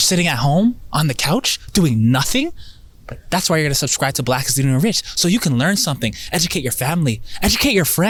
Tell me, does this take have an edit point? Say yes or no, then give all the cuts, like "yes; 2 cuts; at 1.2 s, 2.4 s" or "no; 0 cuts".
no; 0 cuts